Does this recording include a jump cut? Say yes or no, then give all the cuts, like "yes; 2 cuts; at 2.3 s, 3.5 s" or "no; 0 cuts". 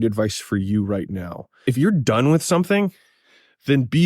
yes; 1 cut; at 1.6 s